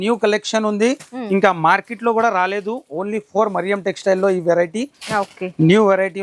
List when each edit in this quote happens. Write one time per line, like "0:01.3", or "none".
none